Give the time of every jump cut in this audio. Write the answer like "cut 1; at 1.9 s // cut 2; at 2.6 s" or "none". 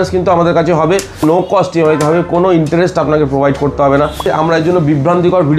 cut 1; at 1.2 s // cut 2; at 4.2 s

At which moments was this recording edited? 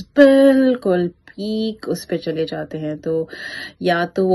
none

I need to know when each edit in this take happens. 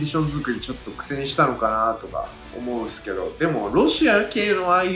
none

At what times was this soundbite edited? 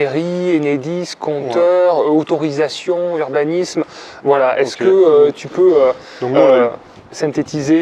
none

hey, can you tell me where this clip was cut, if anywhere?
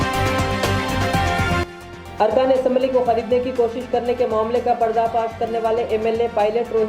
cut 1; at 1.6 s

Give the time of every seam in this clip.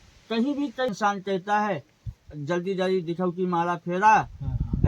cut 1; at 0.9 s

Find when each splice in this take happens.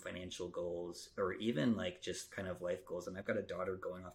none

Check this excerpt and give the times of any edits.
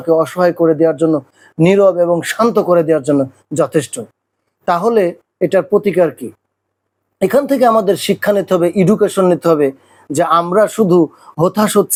none

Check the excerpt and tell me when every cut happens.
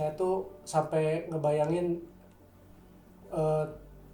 none

